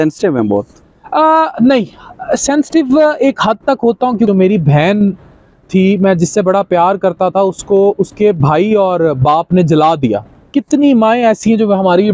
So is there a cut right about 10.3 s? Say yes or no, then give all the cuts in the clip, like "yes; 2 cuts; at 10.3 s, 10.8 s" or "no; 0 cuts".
yes; 2 cuts; at 4.3 s, 10.3 s